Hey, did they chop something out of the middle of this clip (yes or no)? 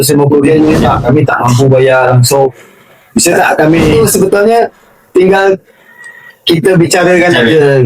yes